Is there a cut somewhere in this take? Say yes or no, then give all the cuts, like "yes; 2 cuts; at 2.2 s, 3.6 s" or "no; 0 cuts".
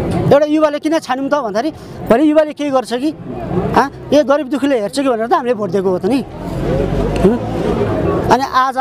no; 0 cuts